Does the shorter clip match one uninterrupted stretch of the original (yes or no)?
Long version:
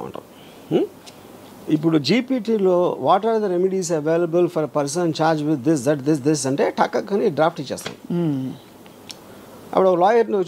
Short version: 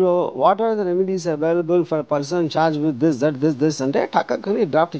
yes